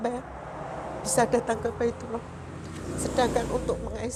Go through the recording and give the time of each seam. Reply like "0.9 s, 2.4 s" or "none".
none